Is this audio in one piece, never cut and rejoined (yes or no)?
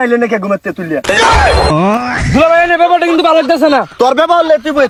yes